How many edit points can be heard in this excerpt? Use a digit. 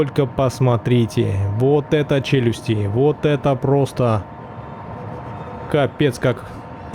0